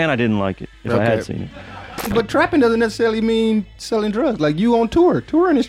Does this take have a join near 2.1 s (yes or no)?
yes